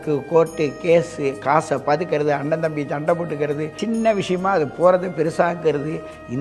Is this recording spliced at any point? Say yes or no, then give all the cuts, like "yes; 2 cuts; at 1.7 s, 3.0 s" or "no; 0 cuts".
yes; 1 cut; at 3.7 s